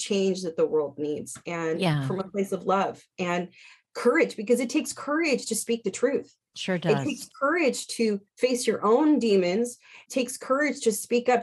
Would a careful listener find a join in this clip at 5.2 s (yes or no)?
no